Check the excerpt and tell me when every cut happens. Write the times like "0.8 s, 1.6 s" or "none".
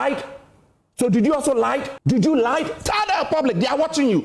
1.9 s